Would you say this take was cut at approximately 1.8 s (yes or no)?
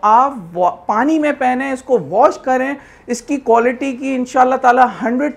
no